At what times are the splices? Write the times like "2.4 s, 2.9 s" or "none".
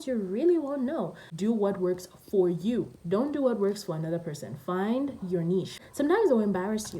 1.2 s, 5.8 s